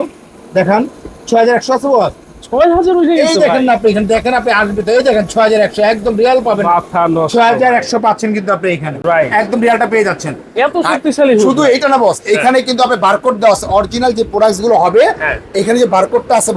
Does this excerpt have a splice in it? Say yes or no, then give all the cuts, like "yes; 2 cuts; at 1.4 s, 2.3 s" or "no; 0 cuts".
no; 0 cuts